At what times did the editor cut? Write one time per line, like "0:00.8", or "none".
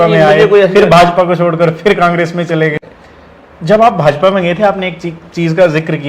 0:02.8